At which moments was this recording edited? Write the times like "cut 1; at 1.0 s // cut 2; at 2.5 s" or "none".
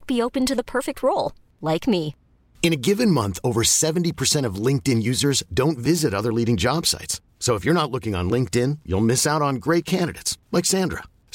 none